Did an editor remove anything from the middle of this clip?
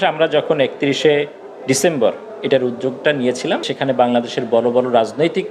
yes; 1 cut; at 3.7 s

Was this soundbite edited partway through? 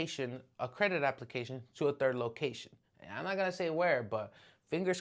no; 0 cuts

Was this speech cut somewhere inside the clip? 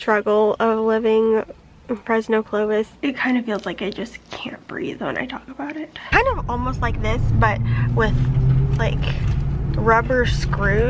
yes; 2 cuts; at 2.9 s, 6.1 s

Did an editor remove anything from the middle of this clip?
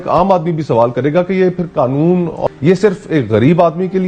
yes; 1 cut; at 2.4 s

